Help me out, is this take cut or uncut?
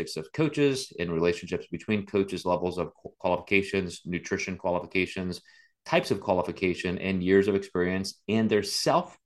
uncut